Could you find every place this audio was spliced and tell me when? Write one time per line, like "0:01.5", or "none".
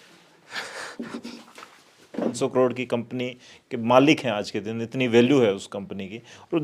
0:02.4